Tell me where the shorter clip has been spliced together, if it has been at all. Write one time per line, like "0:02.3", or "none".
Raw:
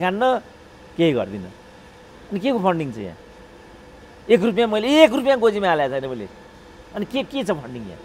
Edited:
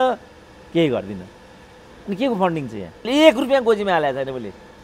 0:03.1